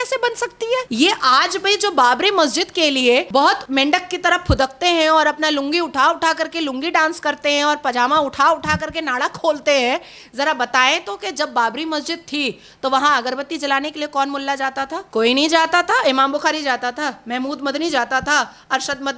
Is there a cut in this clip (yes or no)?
yes